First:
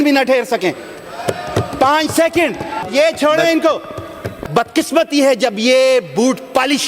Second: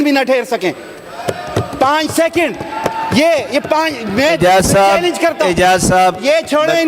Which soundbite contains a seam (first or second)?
first